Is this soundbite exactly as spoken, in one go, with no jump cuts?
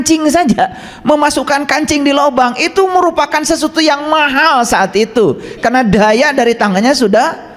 yes; 0 cuts

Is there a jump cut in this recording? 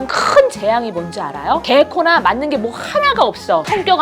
no; 0 cuts

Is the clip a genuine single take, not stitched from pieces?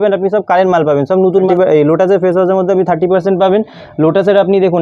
no; 1 cut; at 1.5 s

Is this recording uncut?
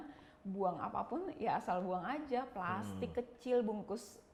yes; 0 cuts

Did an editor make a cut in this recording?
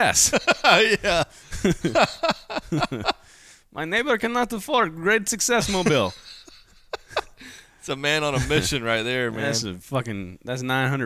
no; 0 cuts

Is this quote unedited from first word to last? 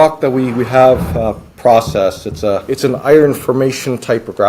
no; 1 cut; at 2.7 s

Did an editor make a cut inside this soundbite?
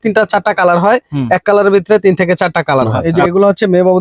yes; 1 cut; at 3.0 s

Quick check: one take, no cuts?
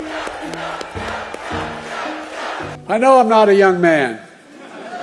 no; 1 cut; at 2.9 s

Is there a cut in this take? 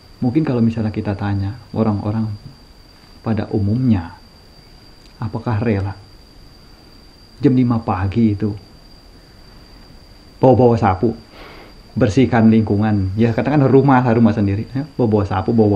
no; 0 cuts

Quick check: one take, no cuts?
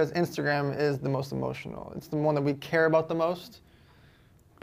yes; 0 cuts

